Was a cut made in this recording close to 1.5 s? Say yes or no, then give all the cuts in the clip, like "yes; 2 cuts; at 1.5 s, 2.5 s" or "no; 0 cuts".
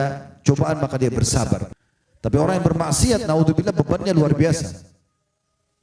yes; 1 cut; at 1.5 s